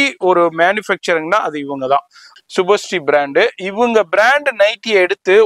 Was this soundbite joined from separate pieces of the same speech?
yes; 1 cut; at 2.2 s

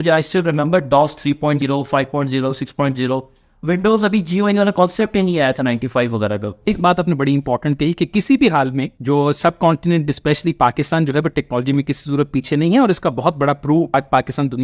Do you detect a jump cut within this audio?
yes; 4 cuts; at 1.6 s, 6.7 s, 8.9 s, 14.0 s

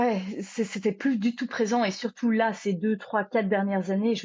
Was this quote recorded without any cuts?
yes; 0 cuts

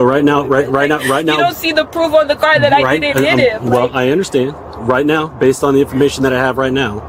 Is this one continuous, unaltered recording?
yes; 0 cuts

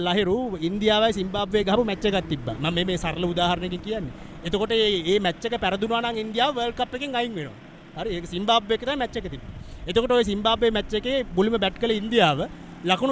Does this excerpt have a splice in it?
no; 0 cuts

